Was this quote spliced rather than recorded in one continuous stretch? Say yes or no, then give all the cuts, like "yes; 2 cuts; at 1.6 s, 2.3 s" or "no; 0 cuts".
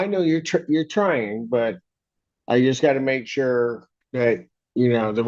no; 0 cuts